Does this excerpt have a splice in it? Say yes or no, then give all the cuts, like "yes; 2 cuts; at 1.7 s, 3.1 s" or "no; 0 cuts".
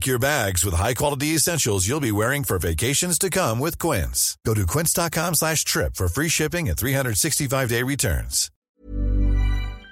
yes; 1 cut; at 8.7 s